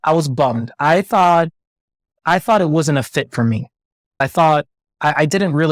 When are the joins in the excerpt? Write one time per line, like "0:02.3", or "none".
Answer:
0:04.2